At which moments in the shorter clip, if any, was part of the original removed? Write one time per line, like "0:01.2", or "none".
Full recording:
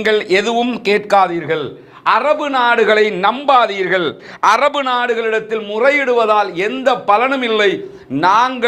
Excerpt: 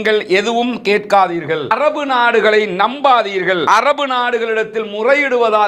0:01.7
0:03.6